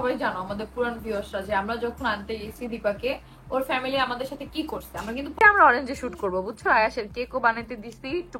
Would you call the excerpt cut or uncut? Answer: cut